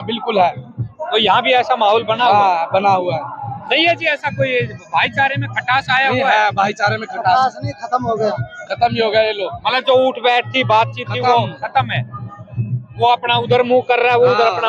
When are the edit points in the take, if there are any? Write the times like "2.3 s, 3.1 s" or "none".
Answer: none